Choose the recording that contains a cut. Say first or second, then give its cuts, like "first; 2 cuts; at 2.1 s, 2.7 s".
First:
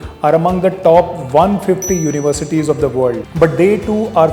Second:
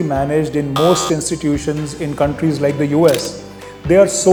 first; 1 cut; at 3.3 s